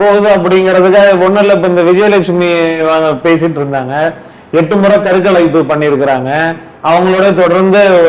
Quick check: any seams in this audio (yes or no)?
no